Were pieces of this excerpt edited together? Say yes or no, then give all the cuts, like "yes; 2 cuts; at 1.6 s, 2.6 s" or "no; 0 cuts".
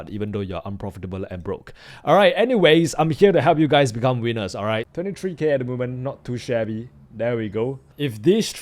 yes; 1 cut; at 4.8 s